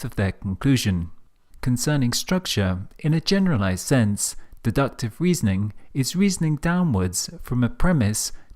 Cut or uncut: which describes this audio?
cut